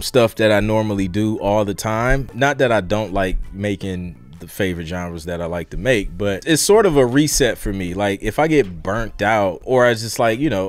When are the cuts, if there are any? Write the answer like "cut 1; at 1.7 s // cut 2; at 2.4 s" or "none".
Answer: cut 1; at 2.3 s // cut 2; at 4.2 s // cut 3; at 6.4 s // cut 4; at 9.6 s